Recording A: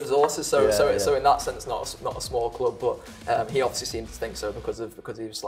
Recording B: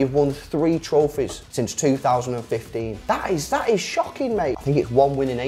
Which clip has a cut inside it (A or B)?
B